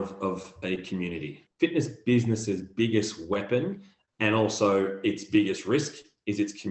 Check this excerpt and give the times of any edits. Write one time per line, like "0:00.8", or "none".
0:01.4